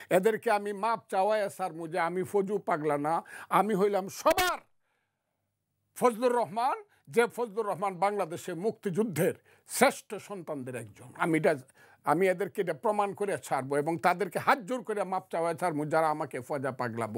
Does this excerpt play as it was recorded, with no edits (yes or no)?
yes